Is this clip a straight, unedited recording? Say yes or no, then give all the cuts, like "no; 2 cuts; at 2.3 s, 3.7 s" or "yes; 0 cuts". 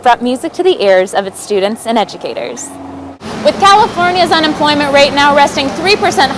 no; 1 cut; at 3.2 s